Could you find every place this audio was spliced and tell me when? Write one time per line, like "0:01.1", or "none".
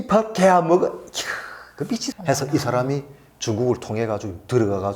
0:02.1